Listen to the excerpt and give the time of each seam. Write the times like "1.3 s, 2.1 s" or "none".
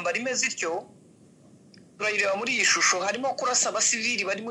none